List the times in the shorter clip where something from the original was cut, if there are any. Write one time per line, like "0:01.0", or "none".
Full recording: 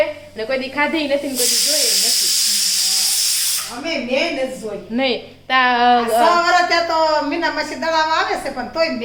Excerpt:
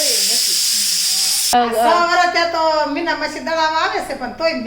0:01.5